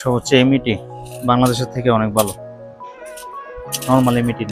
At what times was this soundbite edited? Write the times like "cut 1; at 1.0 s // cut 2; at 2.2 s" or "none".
none